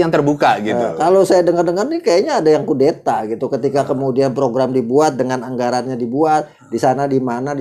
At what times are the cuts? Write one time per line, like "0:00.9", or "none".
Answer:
none